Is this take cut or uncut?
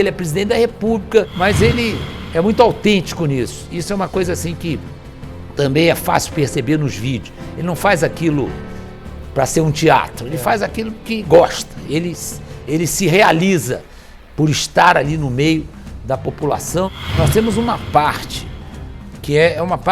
cut